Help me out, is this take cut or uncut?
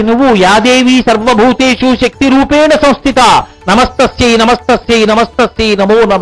uncut